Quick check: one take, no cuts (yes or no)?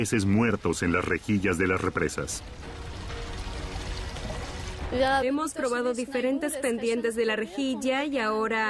yes